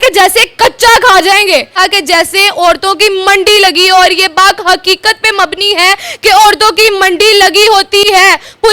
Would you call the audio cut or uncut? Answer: cut